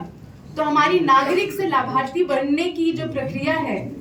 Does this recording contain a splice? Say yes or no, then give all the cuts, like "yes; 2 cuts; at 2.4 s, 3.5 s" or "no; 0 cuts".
no; 0 cuts